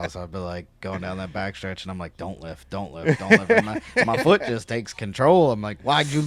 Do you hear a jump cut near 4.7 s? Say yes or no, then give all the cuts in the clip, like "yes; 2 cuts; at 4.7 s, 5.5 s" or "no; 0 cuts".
no; 0 cuts